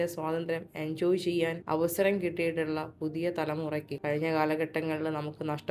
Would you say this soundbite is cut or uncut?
cut